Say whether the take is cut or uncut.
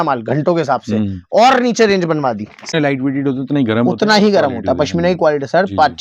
cut